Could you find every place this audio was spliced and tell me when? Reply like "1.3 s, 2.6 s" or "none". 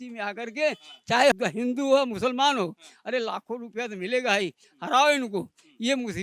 1.3 s